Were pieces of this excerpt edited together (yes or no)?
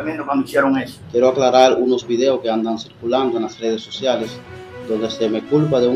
yes